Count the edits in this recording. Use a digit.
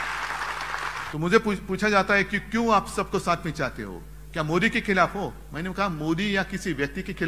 1